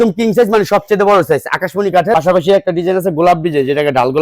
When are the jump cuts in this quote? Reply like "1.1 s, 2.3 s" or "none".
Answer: 2.1 s